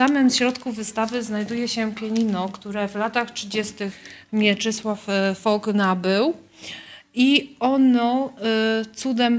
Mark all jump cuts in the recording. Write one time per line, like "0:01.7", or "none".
none